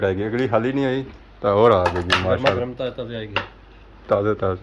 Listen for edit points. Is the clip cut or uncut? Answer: uncut